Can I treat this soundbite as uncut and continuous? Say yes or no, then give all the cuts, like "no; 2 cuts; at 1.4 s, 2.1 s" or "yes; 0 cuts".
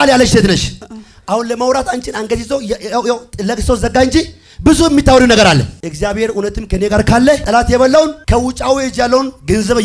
no; 3 cuts; at 5.8 s, 7.4 s, 8.2 s